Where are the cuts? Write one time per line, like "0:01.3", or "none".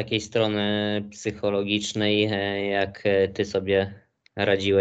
none